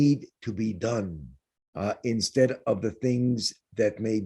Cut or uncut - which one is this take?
uncut